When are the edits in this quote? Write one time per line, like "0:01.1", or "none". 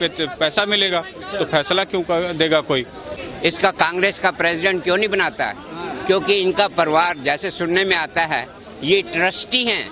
0:03.1